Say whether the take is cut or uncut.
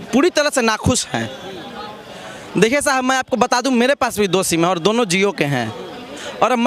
uncut